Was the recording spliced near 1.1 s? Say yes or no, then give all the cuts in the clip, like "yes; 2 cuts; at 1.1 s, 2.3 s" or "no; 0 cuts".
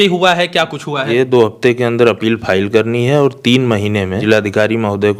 yes; 2 cuts; at 1.1 s, 4.2 s